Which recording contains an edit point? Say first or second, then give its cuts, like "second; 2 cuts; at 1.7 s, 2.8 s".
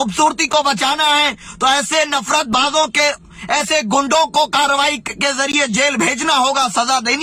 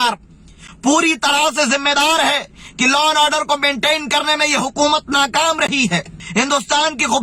second; 1 cut; at 6.2 s